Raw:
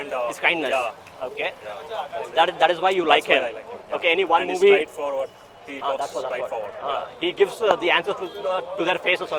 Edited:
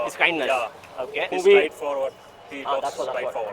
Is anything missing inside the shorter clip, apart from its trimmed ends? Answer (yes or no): yes